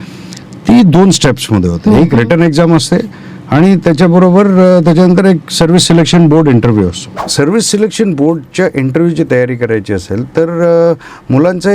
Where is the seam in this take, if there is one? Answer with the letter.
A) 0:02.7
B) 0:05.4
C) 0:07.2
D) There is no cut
C